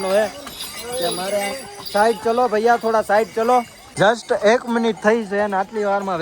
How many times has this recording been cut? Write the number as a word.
one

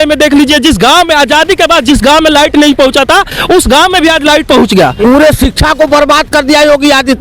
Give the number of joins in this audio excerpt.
one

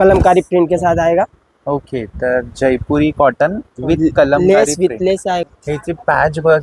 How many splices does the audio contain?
one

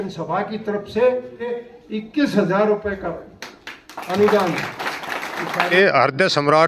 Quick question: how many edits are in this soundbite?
two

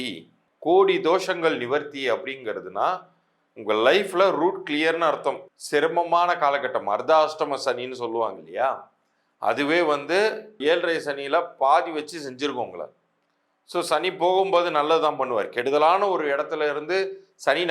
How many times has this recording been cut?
two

